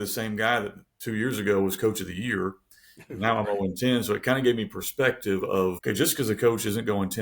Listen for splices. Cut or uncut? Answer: cut